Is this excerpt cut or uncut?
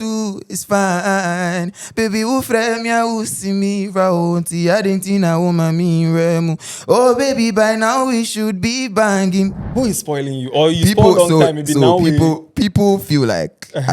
cut